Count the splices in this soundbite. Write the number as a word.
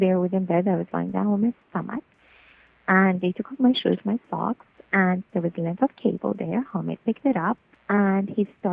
one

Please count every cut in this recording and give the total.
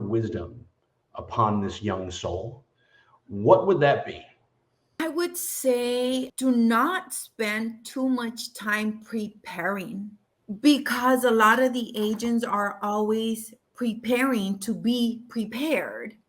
three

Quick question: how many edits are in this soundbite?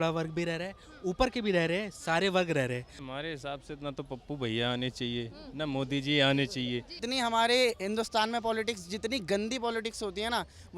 two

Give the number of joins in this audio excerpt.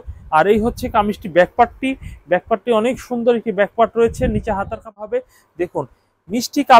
one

